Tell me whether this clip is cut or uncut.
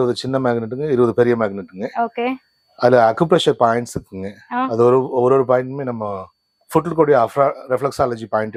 uncut